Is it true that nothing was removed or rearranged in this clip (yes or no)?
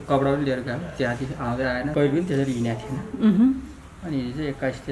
no